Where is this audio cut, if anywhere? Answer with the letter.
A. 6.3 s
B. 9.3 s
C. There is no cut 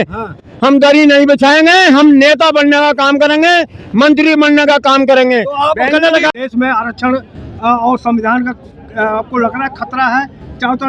A